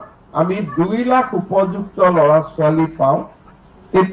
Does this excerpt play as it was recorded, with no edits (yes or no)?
yes